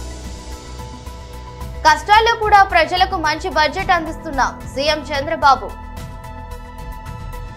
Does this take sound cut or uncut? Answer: uncut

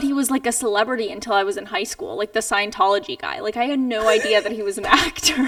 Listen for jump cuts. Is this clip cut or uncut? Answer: uncut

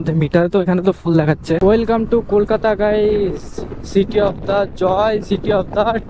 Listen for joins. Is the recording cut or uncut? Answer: cut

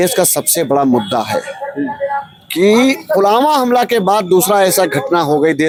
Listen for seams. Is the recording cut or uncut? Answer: uncut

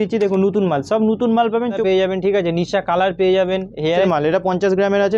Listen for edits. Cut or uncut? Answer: cut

